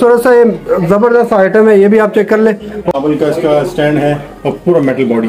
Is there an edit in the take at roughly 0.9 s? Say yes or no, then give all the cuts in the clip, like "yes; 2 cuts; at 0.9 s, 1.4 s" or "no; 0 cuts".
no; 1 cut; at 2.9 s